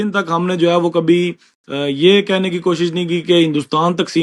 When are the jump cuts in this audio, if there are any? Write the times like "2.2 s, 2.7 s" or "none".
none